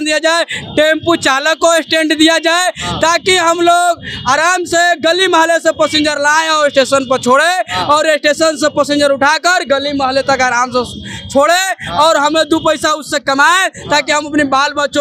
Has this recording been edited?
no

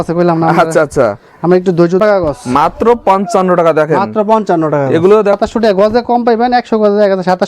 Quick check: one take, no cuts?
no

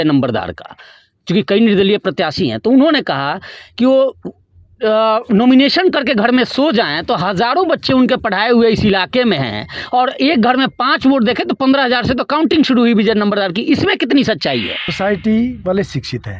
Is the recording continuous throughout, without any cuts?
no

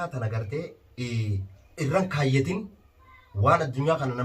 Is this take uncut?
no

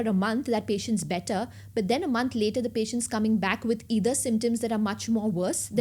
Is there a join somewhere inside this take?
no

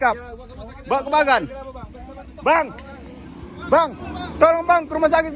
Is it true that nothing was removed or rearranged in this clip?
yes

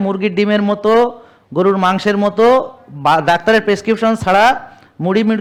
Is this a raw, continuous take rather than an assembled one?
yes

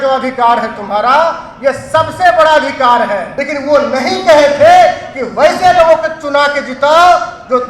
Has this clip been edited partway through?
yes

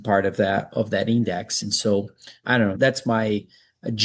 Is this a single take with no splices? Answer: no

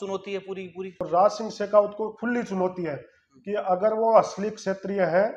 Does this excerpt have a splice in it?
yes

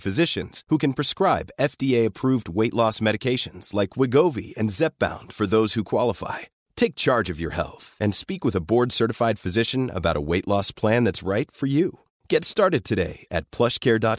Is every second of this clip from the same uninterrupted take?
yes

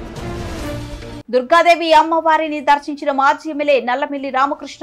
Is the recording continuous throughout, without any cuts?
yes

